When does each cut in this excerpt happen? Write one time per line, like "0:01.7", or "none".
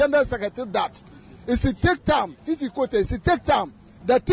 none